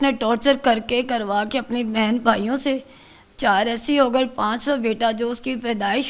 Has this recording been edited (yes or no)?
no